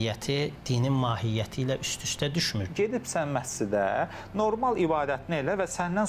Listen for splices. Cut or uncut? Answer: cut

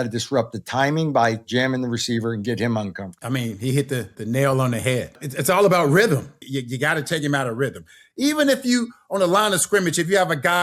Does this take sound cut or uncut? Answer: cut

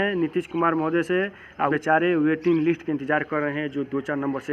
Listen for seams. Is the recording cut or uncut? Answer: cut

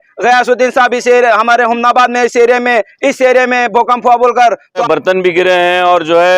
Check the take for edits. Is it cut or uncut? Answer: cut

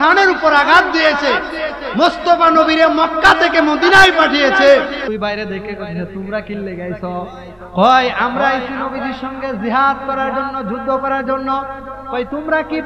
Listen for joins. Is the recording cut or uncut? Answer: cut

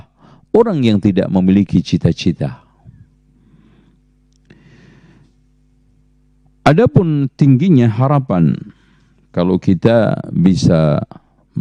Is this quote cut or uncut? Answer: uncut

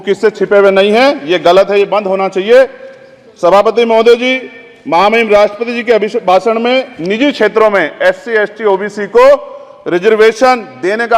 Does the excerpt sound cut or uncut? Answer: uncut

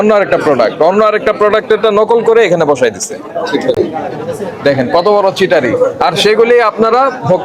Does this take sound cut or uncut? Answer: uncut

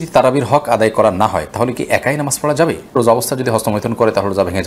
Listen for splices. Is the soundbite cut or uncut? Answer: cut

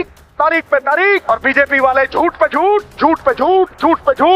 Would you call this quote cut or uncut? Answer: cut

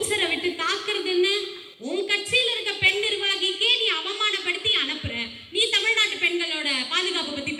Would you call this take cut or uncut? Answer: uncut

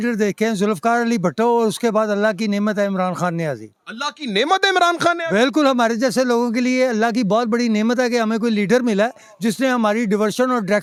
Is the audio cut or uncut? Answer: uncut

